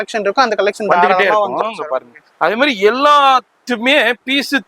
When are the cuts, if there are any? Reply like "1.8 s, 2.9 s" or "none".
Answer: 2.2 s